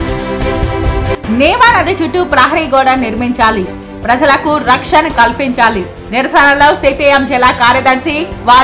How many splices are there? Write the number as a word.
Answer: one